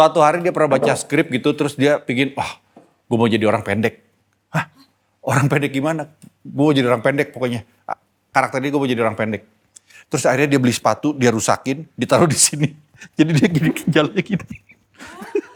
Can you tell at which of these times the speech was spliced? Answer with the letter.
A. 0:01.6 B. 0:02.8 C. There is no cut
C